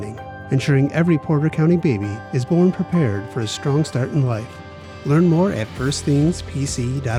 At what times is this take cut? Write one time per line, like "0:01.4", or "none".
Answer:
none